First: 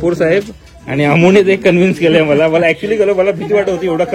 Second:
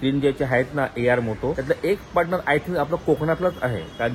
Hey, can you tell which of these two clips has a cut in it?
second; 1 cut; at 1.6 s

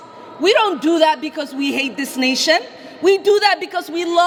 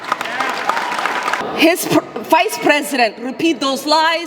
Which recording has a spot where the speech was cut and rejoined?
second; 1 cut; at 1.4 s

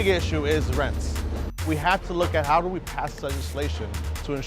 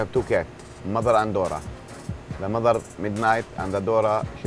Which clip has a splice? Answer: first; 1 cut; at 1.4 s

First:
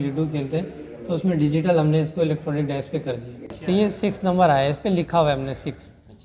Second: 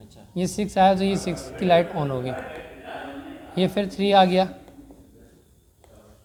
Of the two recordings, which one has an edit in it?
first; 1 cut; at 3.5 s

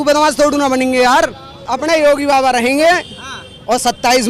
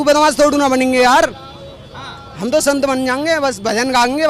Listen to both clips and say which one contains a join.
first; 1 cut; at 1.7 s

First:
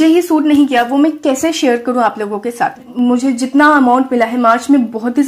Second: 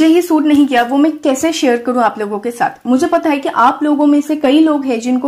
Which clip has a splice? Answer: first; 1 cut; at 2.8 s

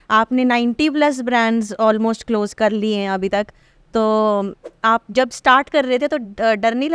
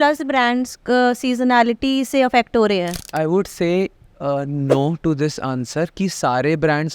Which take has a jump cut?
second; 1 cut; at 3.0 s

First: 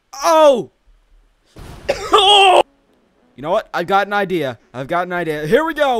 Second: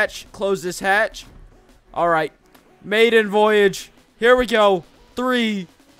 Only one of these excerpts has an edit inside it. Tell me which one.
first; 1 cut; at 2.7 s

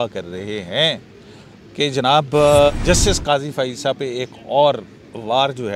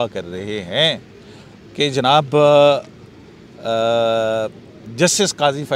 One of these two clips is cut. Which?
first; 1 cut; at 2.7 s

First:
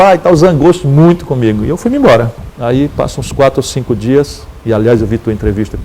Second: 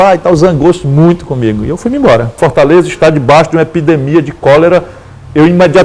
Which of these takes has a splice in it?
second; 1 cut; at 2.4 s

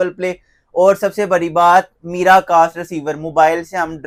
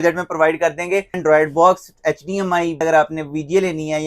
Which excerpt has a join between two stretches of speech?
second; 2 cuts; at 1.2 s, 2.8 s

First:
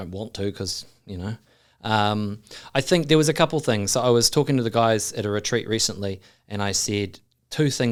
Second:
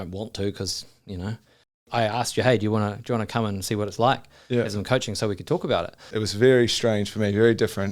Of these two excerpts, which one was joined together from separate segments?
second; 2 cuts; at 1.8 s, 6.0 s

